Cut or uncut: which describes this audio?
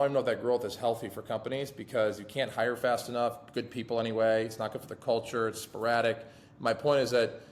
uncut